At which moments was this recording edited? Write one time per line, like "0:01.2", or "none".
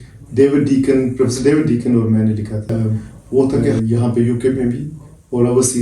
0:03.8